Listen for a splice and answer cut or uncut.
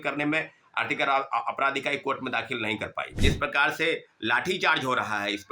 cut